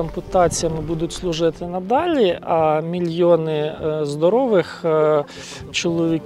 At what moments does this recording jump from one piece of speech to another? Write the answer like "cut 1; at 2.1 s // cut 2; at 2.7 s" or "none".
none